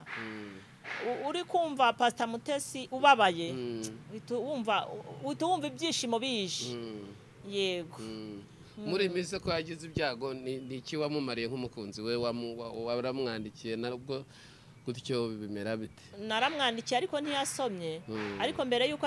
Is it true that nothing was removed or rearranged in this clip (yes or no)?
yes